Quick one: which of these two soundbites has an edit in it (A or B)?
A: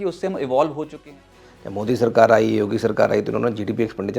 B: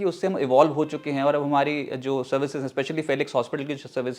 A